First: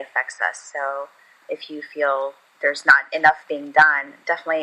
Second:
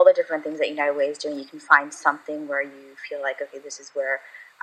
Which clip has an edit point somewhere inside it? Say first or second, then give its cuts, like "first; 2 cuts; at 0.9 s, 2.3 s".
first; 2 cuts; at 1.4 s, 2.5 s